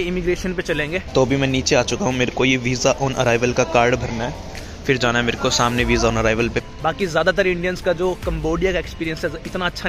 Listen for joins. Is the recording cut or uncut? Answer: cut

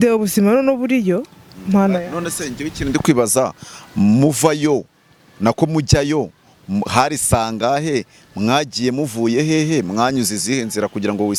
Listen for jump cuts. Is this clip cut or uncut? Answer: uncut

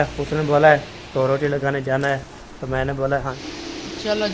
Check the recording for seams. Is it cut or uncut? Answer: cut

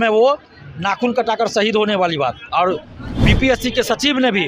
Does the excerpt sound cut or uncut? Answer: cut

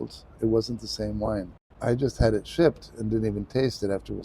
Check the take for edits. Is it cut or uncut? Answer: cut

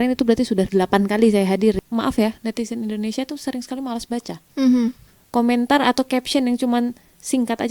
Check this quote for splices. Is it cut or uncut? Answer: cut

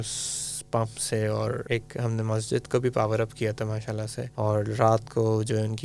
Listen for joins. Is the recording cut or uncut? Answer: cut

